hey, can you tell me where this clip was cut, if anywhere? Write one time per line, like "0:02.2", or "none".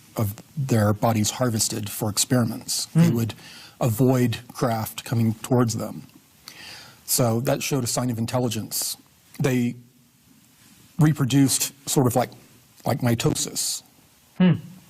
0:03.9